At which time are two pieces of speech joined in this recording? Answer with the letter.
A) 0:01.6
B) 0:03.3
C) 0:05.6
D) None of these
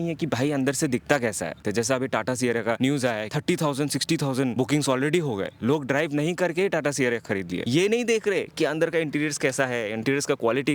A